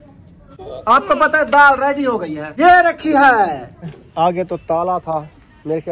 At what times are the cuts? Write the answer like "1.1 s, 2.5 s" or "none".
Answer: 2.4 s, 4.0 s